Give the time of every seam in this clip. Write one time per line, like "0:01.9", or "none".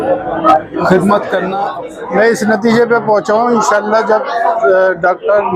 0:01.5